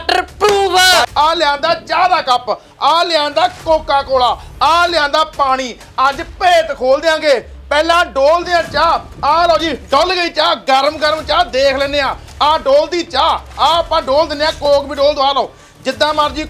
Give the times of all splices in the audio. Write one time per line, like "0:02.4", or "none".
0:01.1